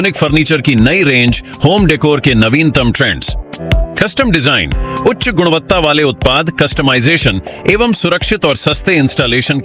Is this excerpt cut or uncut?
cut